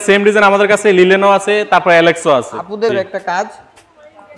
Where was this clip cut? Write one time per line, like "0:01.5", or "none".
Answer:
0:02.9